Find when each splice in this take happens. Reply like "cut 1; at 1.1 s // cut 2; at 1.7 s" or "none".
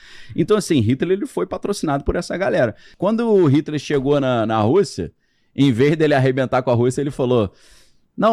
cut 1; at 2.9 s